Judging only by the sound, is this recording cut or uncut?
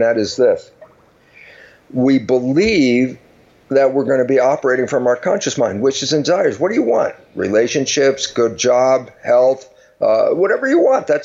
uncut